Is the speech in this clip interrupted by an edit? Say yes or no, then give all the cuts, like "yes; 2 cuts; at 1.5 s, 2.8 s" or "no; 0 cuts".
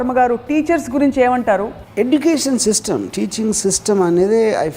yes; 1 cut; at 1.8 s